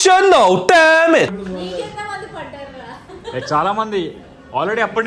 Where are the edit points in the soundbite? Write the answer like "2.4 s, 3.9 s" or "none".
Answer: 1.3 s